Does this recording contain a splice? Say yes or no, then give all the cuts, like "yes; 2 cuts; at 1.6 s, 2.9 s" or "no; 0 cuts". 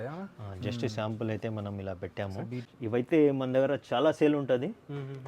yes; 1 cut; at 2.6 s